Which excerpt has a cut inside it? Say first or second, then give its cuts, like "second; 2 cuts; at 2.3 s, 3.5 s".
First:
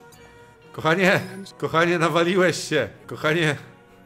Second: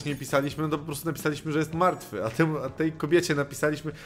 first; 2 cuts; at 1.4 s, 3.0 s